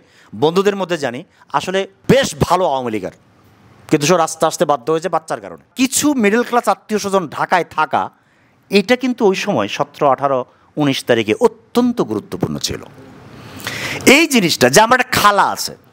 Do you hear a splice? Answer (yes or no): yes